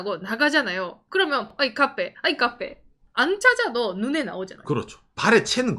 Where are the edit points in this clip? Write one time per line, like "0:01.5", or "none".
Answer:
0:01.5